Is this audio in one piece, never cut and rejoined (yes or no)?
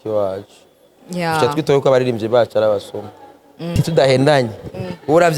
no